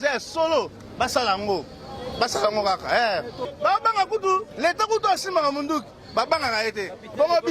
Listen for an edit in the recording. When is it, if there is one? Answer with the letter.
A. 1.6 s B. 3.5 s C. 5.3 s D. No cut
B